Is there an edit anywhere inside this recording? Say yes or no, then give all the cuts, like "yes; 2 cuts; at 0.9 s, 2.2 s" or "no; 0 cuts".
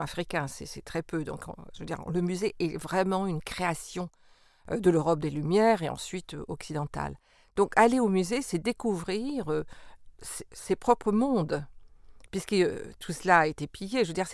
no; 0 cuts